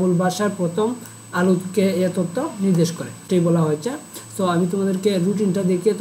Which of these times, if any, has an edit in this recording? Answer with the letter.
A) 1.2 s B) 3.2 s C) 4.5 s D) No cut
B